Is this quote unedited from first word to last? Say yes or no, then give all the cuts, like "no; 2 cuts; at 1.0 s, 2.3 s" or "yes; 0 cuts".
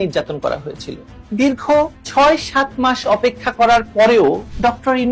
no; 1 cut; at 1.2 s